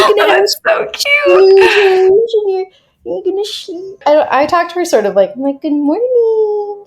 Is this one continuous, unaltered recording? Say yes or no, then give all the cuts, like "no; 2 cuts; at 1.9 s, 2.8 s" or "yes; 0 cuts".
no; 1 cut; at 4.0 s